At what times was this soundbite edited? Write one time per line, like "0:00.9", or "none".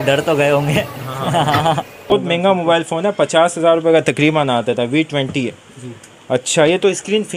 0:02.1